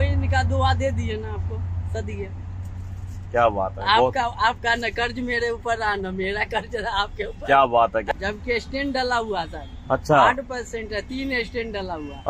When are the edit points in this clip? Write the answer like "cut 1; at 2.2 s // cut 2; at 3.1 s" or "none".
none

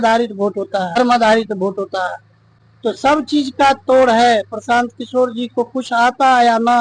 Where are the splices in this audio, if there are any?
cut 1; at 1.0 s

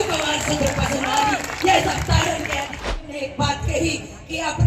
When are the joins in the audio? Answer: cut 1; at 2.9 s

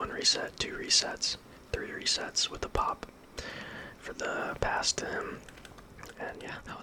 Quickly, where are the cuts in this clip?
none

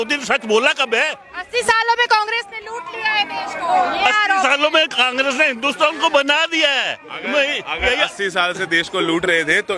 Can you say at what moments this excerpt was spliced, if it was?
none

